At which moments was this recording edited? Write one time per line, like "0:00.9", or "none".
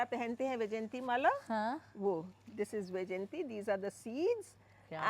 none